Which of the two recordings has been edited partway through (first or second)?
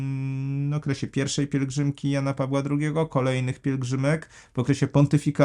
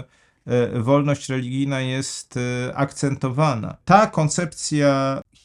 second